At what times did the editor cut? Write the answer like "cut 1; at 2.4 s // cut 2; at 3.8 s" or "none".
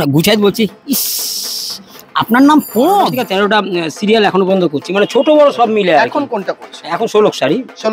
cut 1; at 3.2 s